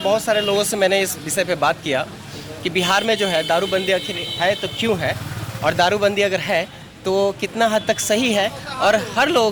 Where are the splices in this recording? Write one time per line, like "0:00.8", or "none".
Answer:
none